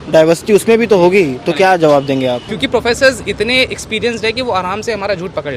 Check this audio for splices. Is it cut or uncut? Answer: cut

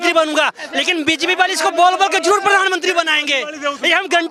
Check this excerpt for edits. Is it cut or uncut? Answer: uncut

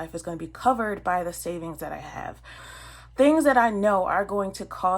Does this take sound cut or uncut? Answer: cut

